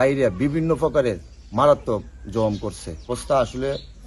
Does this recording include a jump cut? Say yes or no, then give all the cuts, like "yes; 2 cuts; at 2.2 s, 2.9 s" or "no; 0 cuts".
no; 0 cuts